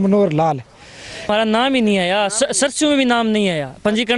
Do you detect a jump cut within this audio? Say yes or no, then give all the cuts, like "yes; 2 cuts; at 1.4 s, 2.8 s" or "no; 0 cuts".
yes; 1 cut; at 1.3 s